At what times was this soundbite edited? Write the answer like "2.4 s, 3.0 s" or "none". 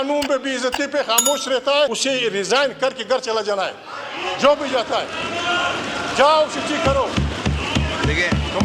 2.0 s